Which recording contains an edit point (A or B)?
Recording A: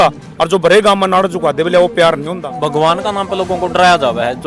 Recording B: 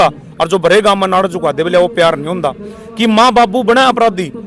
A